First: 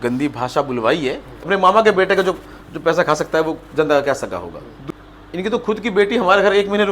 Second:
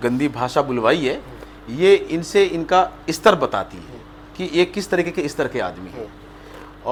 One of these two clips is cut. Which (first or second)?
first